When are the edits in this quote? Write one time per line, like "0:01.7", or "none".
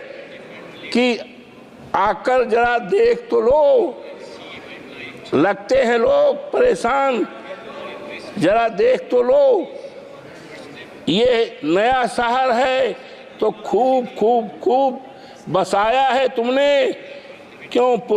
none